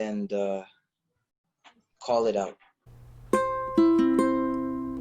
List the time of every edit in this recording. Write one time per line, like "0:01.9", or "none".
0:03.0